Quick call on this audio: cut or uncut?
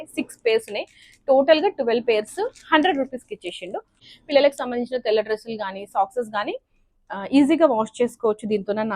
cut